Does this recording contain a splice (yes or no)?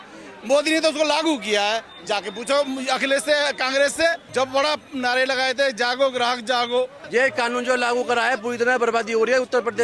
yes